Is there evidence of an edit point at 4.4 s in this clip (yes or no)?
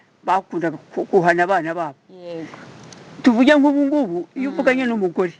no